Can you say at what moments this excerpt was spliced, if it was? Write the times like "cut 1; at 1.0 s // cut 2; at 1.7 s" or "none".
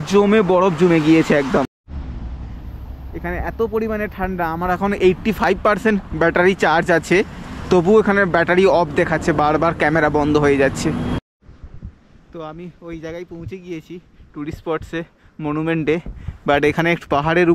cut 1; at 1.8 s // cut 2; at 11.2 s